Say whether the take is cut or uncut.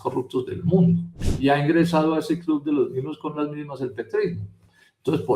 cut